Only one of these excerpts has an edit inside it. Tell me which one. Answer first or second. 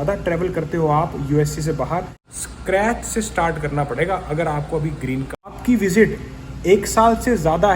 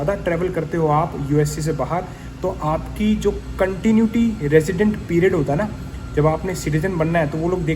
first